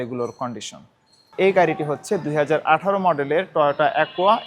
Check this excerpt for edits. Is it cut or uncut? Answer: cut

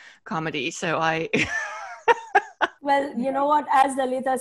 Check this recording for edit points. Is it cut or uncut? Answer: cut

